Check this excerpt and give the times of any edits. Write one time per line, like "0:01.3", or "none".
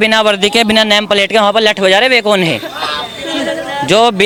none